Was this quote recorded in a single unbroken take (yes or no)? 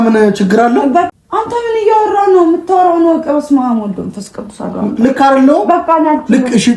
no